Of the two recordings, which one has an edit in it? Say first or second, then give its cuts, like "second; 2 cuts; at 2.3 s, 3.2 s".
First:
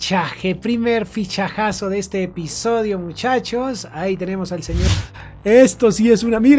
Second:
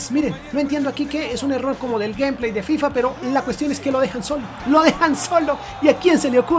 first; 1 cut; at 4.8 s